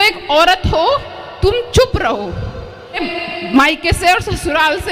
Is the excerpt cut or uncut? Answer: cut